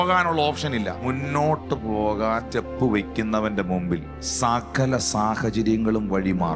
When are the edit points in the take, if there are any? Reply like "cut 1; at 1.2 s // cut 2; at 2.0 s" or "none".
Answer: cut 1; at 1.0 s // cut 2; at 2.5 s // cut 3; at 4.2 s